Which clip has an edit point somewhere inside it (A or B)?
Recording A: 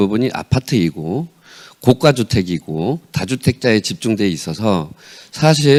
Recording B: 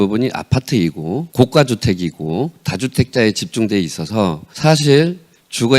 B